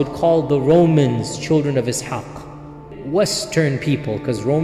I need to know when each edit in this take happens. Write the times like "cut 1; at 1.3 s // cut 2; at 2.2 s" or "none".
cut 1; at 2.9 s

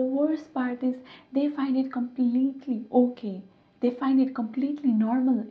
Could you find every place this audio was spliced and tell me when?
none

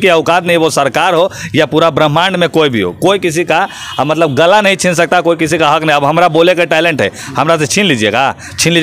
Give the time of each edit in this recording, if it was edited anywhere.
none

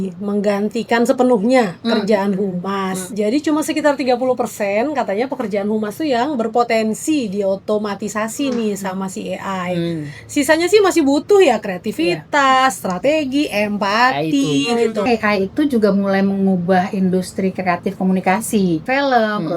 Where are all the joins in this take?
cut 1; at 3.0 s // cut 2; at 15.1 s // cut 3; at 18.8 s

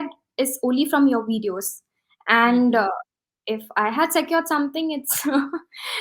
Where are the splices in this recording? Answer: none

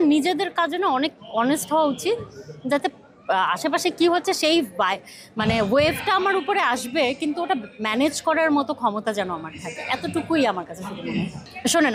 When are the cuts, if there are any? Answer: none

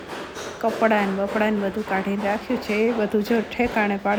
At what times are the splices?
none

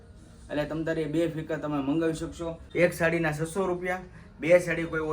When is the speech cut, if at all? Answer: cut 1; at 2.6 s

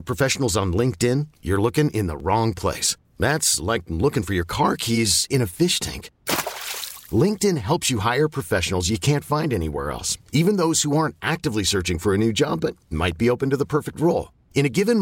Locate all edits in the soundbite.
none

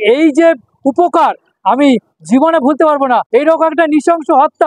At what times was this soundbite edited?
cut 1; at 3.3 s

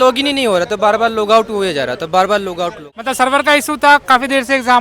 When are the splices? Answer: cut 1; at 2.8 s

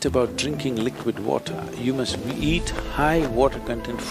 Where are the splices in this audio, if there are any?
none

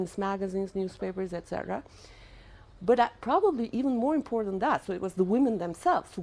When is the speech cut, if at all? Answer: cut 1; at 3.7 s

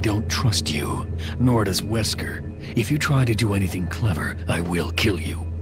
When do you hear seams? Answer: none

